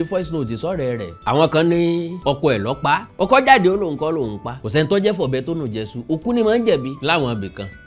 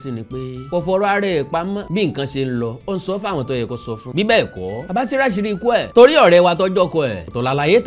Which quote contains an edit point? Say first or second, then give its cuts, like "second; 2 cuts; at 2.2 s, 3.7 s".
first; 2 cuts; at 1.1 s, 4.5 s